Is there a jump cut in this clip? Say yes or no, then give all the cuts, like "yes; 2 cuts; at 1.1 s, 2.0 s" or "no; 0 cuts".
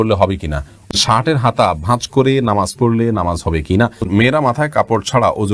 yes; 2 cuts; at 0.9 s, 4.1 s